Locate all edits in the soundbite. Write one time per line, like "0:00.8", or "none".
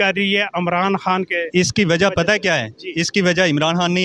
none